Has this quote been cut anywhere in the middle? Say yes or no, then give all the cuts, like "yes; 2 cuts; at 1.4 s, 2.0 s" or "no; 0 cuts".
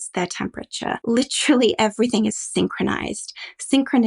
yes; 1 cut; at 1.0 s